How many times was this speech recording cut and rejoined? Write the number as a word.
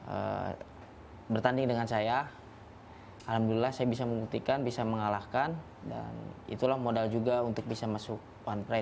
zero